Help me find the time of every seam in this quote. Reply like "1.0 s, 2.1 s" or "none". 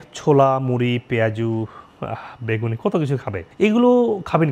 3.4 s